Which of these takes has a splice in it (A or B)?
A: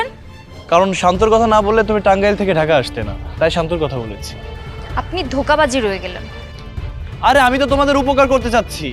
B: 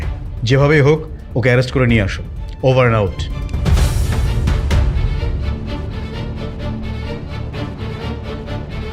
B